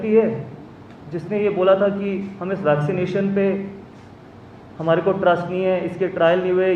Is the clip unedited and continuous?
yes; 0 cuts

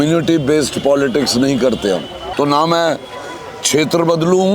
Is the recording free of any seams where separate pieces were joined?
no; 1 cut; at 2.2 s

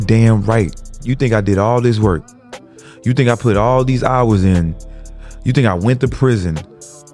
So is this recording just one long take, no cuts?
no; 1 cut; at 1.1 s

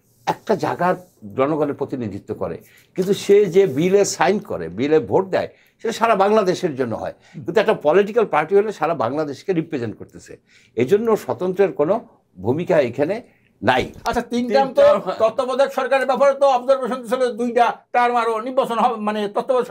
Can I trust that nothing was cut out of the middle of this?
no; 1 cut; at 13.9 s

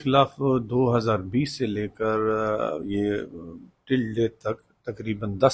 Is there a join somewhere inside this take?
no; 0 cuts

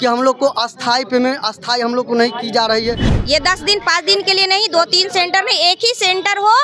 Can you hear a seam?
yes; 1 cut; at 3.1 s

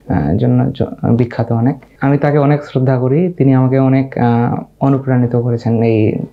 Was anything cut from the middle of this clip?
yes; 1 cut; at 1.9 s

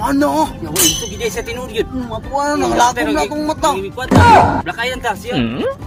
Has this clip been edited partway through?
no; 0 cuts

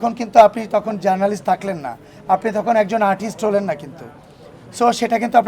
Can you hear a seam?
no; 0 cuts

